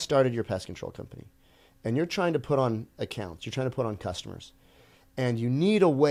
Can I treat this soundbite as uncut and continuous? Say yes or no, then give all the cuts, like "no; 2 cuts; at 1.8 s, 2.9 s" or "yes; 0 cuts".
yes; 0 cuts